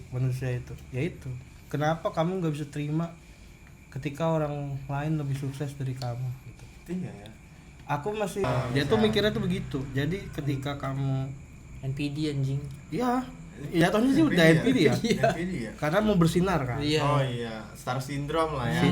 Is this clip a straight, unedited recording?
no; 1 cut; at 8.4 s

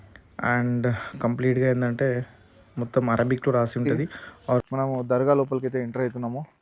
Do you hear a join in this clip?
yes; 1 cut; at 4.6 s

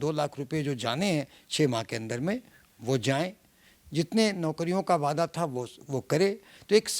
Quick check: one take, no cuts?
yes; 0 cuts

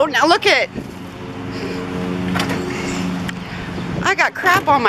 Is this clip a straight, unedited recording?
yes; 0 cuts

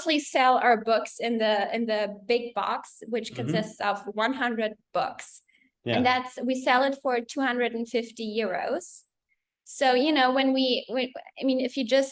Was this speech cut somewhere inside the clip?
no; 0 cuts

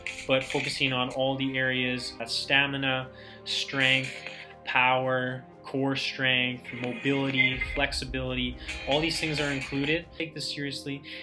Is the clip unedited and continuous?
no; 2 cuts; at 2.3 s, 10.1 s

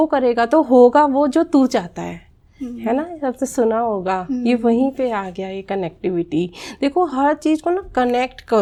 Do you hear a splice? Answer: no; 0 cuts

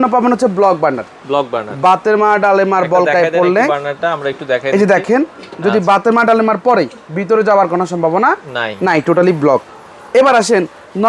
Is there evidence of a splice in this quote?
no; 0 cuts

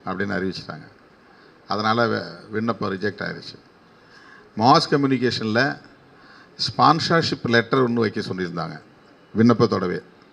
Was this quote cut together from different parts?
no; 0 cuts

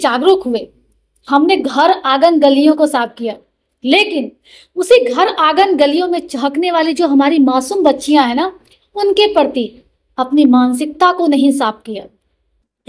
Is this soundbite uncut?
yes; 0 cuts

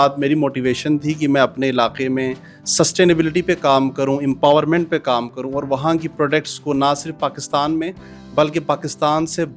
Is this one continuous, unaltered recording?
yes; 0 cuts

